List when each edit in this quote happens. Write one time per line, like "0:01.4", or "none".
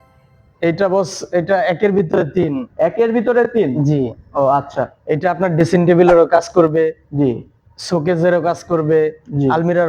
none